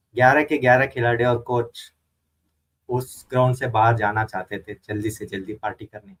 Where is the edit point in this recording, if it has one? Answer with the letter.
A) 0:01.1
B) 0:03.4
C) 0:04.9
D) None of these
D